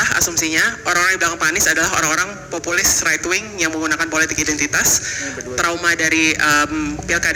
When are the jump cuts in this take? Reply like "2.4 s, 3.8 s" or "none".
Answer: none

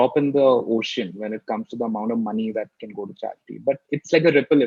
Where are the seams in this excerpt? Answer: none

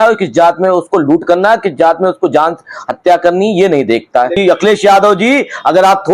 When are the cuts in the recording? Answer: 4.4 s

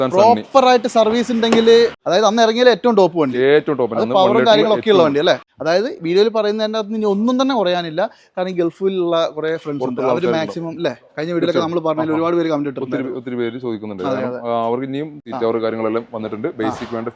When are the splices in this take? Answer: 2.0 s, 5.5 s, 15.2 s

